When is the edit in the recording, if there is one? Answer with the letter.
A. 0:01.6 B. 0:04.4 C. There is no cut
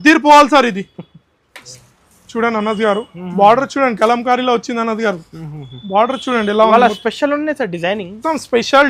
A